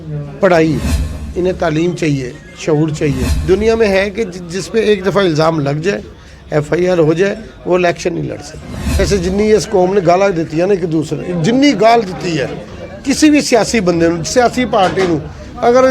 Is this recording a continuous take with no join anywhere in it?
no; 2 cuts; at 3.3 s, 8.8 s

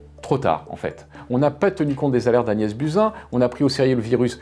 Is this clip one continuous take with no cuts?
yes; 0 cuts

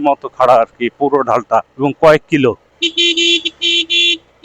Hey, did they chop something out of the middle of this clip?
yes; 2 cuts; at 1.7 s, 2.7 s

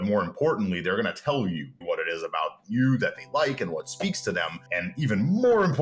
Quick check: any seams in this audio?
yes; 2 cuts; at 1.8 s, 4.6 s

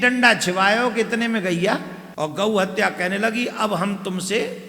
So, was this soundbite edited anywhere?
yes; 1 cut; at 2.0 s

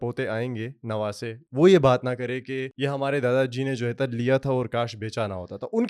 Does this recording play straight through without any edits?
no; 2 cuts; at 1.4 s, 2.7 s

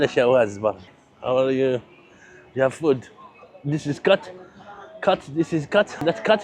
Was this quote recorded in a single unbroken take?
no; 1 cut; at 1.0 s

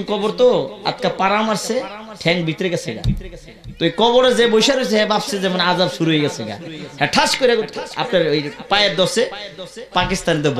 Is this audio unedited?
yes; 0 cuts

